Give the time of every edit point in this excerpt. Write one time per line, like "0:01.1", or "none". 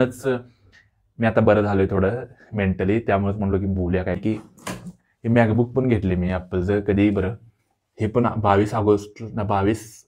0:04.2